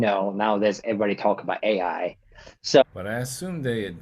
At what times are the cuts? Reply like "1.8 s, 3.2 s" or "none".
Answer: 2.9 s